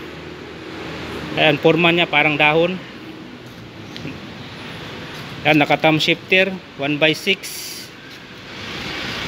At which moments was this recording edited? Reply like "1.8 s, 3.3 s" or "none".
none